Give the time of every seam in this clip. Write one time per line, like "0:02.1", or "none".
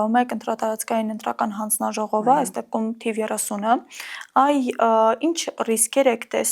none